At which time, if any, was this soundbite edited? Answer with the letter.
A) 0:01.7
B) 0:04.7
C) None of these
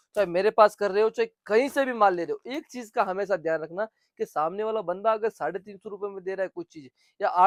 C